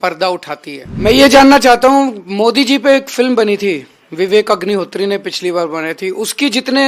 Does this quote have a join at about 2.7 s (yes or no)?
no